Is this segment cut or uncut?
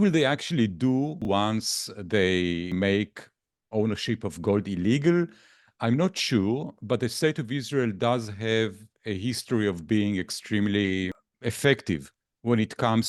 cut